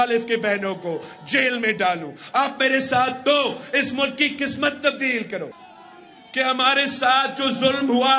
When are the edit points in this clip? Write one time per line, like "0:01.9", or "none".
0:05.6